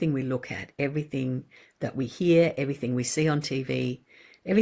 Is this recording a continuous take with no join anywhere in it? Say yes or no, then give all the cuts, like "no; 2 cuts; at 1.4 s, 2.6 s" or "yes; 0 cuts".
yes; 0 cuts